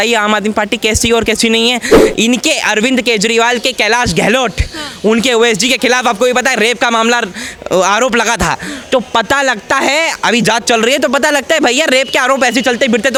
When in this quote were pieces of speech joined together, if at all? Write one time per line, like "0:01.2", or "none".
none